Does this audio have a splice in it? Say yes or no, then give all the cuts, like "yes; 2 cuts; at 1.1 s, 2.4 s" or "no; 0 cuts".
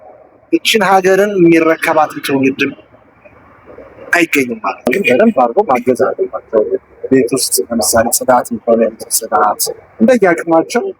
yes; 1 cut; at 4.9 s